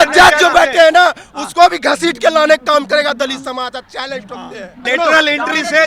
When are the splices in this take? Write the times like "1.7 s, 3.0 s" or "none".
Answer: 4.8 s